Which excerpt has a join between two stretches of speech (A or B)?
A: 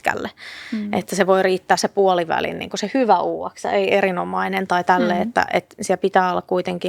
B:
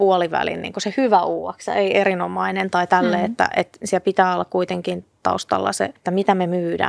B